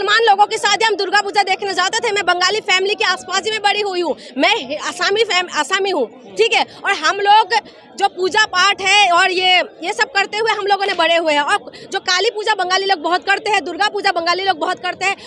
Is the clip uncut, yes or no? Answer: yes